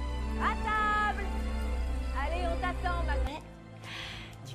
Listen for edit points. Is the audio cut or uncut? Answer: cut